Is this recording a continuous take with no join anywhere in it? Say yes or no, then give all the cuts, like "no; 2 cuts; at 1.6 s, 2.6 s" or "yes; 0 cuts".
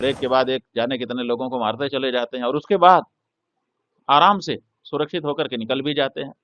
yes; 0 cuts